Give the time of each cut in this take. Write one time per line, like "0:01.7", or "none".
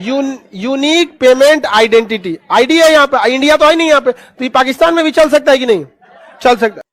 none